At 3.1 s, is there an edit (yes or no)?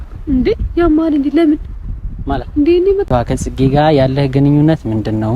yes